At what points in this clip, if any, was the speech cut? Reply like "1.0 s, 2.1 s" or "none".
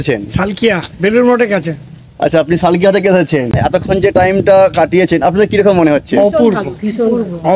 3.6 s